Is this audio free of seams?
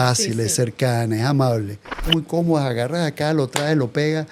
no; 1 cut; at 1.9 s

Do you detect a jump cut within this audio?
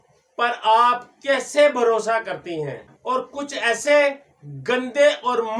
yes; 1 cut; at 2.9 s

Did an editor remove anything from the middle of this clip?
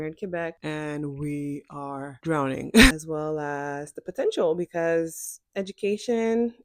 yes; 1 cut; at 2.9 s

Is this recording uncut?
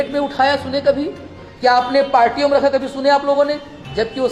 yes; 0 cuts

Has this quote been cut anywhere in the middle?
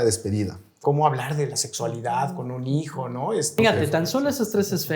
yes; 2 cuts; at 0.8 s, 3.5 s

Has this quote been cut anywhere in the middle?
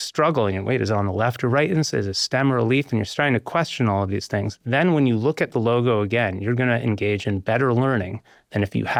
no; 0 cuts

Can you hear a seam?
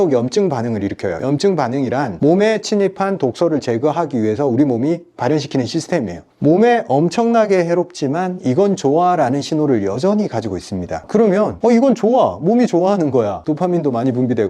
yes; 1 cut; at 6.3 s

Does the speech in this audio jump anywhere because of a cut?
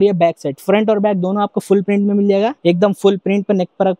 yes; 1 cut; at 2.6 s

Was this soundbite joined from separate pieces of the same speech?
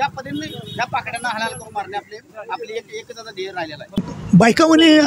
yes; 1 cut; at 4.1 s

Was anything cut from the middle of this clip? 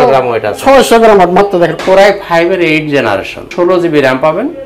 yes; 2 cuts; at 1.8 s, 3.5 s

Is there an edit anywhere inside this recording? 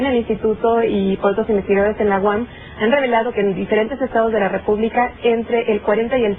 no; 0 cuts

